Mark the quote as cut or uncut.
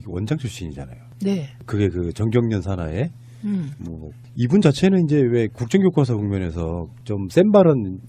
cut